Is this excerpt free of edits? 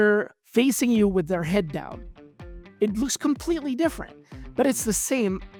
yes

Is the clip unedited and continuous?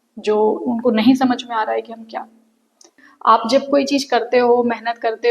no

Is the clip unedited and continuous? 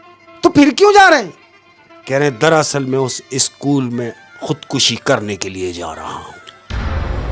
yes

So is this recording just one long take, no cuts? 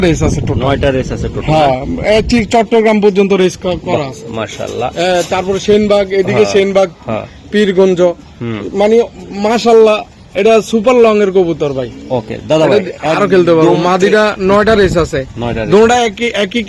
yes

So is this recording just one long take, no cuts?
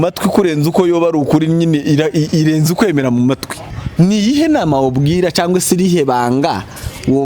no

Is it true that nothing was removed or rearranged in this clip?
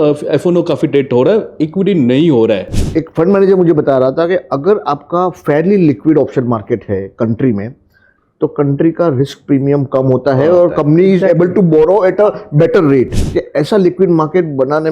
no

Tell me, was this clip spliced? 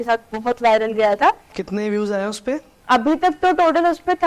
yes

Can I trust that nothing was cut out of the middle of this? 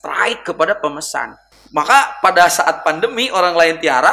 no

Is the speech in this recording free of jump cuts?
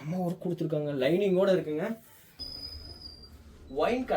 no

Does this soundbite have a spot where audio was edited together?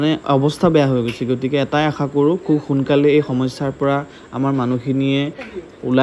no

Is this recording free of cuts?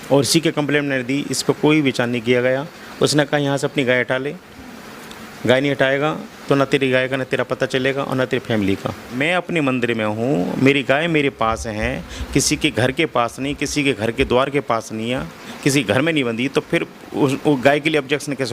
no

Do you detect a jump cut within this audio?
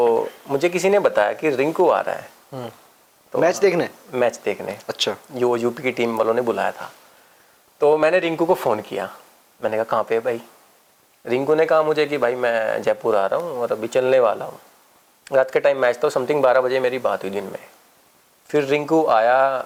no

